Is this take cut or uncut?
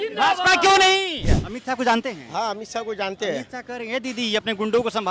cut